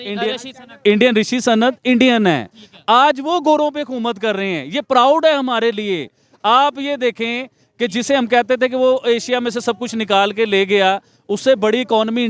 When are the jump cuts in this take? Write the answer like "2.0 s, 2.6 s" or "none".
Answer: none